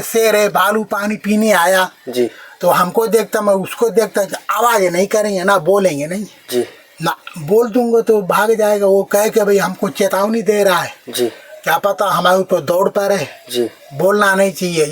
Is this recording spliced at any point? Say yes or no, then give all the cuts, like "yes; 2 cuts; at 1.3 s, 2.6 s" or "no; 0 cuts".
no; 0 cuts